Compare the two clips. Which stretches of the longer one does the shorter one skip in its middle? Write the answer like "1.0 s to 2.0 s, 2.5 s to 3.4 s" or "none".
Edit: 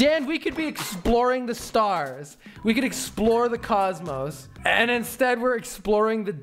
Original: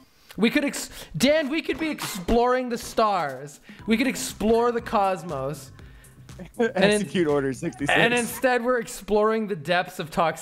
5.8 s to 7.8 s